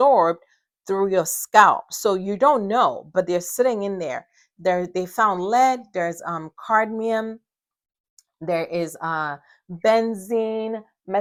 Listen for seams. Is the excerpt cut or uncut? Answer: uncut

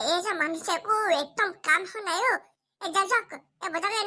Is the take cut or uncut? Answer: uncut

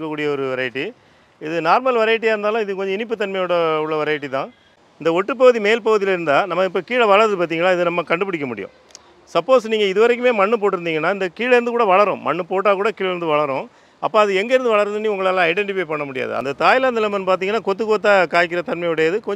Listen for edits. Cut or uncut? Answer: cut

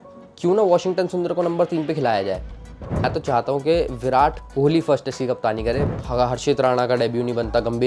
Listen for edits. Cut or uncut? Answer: cut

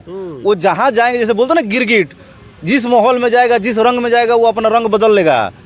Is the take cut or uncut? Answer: uncut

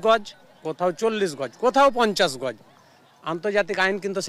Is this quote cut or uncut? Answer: uncut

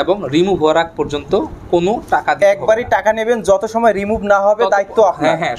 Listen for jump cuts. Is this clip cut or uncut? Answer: uncut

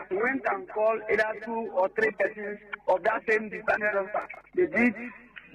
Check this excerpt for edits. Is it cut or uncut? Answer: cut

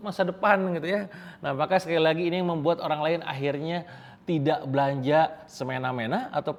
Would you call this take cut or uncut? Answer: uncut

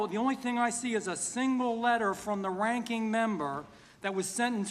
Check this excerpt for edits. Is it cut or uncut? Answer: uncut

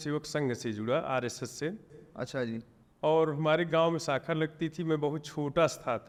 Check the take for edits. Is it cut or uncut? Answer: uncut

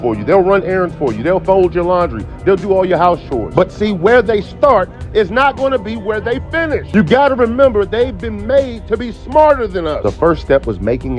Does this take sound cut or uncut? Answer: cut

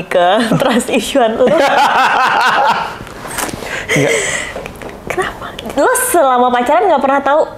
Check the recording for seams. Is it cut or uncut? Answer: uncut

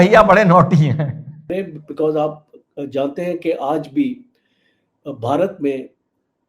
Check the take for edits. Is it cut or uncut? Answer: cut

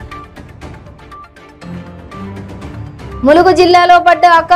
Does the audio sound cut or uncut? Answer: cut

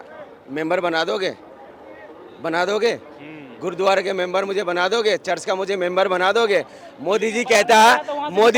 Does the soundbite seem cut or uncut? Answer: uncut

